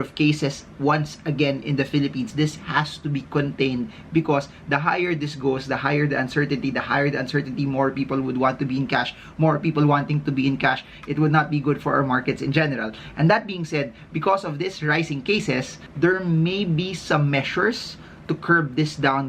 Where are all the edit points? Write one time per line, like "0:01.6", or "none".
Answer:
0:02.3
0:15.8